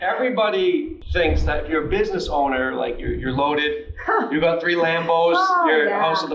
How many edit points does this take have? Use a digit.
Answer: 1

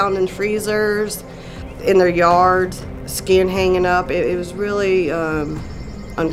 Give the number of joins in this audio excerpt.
0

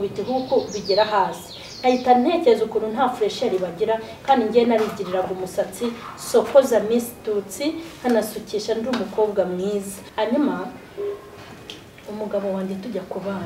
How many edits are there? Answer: 1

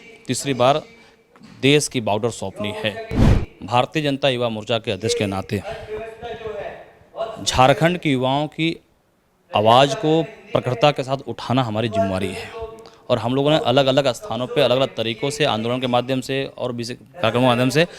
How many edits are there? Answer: 1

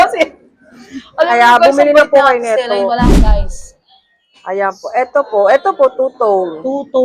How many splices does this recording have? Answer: 1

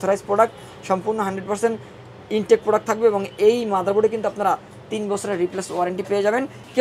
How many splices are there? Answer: 0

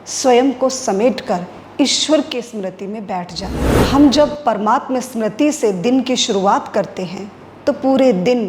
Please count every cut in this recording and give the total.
1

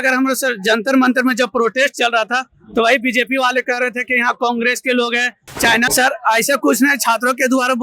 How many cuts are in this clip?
1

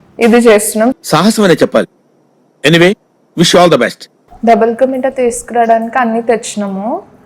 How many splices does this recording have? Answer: 1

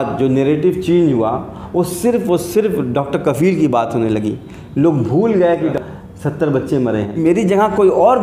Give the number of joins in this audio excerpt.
2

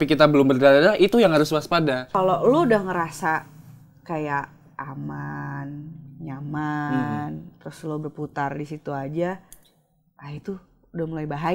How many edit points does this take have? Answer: 1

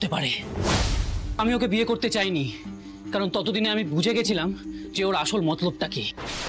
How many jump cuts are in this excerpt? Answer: 1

